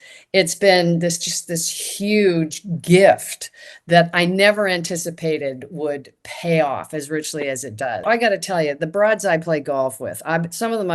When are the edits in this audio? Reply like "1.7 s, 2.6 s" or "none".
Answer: 8.1 s